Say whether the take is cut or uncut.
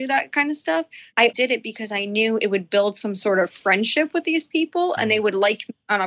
cut